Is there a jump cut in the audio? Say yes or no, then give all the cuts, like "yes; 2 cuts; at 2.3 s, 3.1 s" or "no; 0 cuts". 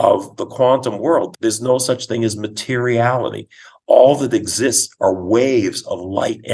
yes; 1 cut; at 1.3 s